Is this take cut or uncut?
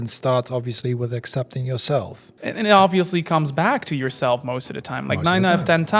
cut